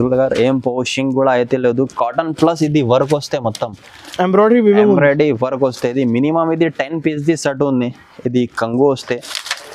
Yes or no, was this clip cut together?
no